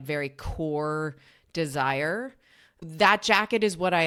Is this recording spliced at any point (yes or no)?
no